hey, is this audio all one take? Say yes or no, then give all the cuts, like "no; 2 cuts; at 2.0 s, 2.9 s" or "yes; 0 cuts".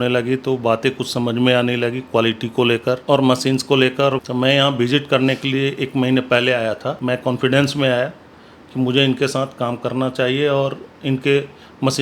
no; 3 cuts; at 3.0 s, 4.2 s, 7.0 s